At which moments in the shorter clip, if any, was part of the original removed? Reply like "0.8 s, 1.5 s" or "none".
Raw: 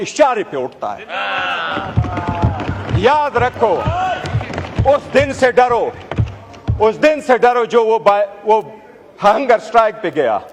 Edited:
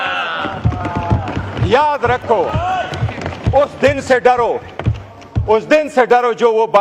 none

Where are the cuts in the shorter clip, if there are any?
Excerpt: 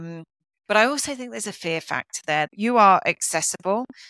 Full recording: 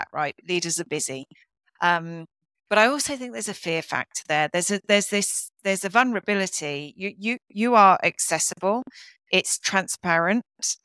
2.5 s

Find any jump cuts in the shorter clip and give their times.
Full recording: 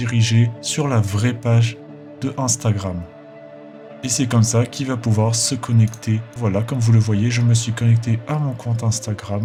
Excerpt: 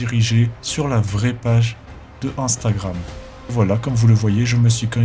3.4 s

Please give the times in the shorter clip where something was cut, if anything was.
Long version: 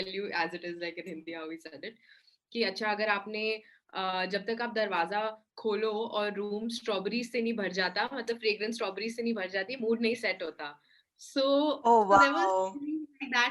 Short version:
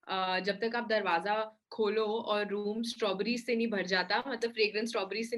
none

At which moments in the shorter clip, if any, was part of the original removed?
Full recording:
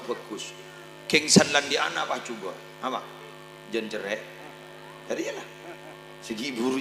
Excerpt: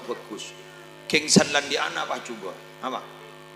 none

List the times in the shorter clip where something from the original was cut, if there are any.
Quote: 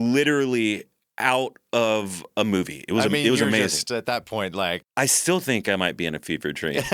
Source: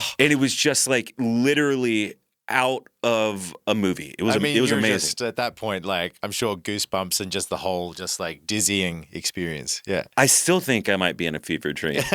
4.9 s

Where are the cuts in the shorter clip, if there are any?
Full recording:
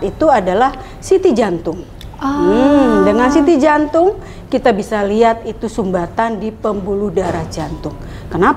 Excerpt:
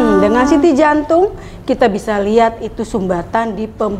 none

